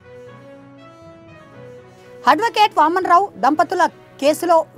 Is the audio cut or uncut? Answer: cut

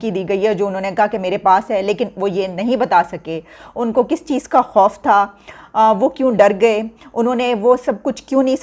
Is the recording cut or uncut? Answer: uncut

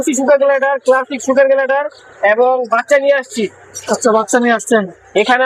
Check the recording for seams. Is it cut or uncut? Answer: uncut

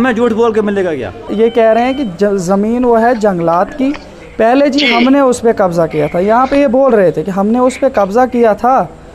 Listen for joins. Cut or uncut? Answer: cut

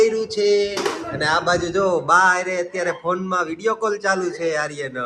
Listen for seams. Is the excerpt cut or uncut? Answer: uncut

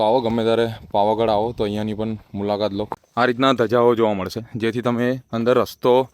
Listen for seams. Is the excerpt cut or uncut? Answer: cut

